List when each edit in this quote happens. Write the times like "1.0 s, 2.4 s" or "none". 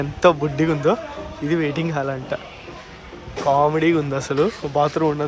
none